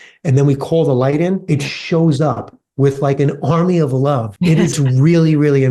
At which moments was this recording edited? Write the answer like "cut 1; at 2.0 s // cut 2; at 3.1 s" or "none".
cut 1; at 1.4 s // cut 2; at 4.7 s